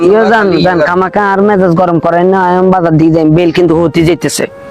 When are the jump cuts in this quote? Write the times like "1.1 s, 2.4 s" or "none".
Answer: none